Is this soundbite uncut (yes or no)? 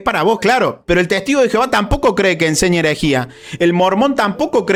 yes